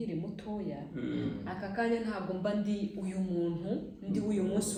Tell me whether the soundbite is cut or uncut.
uncut